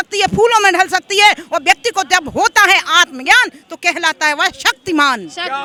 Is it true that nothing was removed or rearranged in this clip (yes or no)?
yes